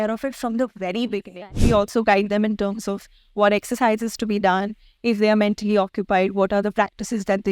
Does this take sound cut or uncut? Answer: cut